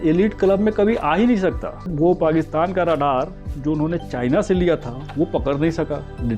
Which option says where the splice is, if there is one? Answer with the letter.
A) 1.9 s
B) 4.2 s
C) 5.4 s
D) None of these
A